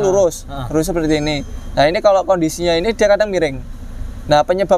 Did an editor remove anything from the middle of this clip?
no; 0 cuts

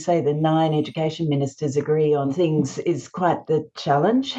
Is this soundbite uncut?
no; 1 cut; at 2.3 s

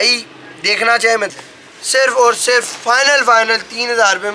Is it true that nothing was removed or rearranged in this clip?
no; 1 cut; at 1.4 s

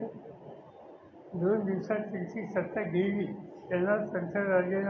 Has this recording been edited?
no; 0 cuts

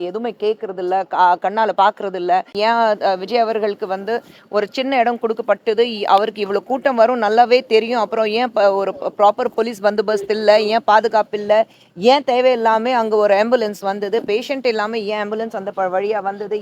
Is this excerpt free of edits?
no; 1 cut; at 2.5 s

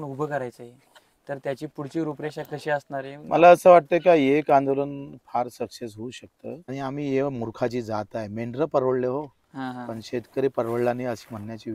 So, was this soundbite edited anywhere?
yes; 1 cut; at 6.6 s

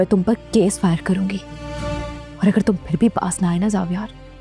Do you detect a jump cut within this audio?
no; 0 cuts

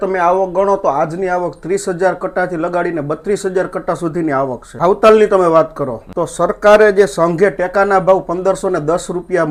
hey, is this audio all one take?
yes; 0 cuts

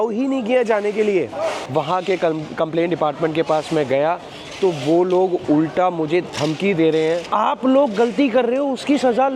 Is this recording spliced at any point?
yes; 2 cuts; at 1.6 s, 7.3 s

